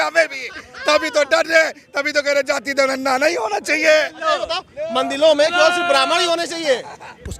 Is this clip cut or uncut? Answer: uncut